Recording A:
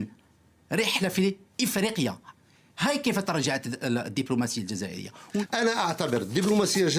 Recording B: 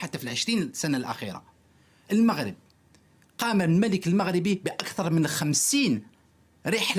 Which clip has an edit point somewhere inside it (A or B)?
A